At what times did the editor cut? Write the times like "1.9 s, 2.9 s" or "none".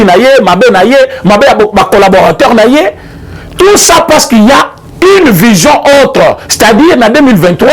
none